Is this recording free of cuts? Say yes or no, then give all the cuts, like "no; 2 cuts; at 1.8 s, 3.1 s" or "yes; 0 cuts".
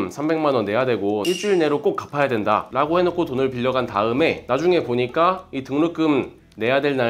no; 2 cuts; at 1.2 s, 2.7 s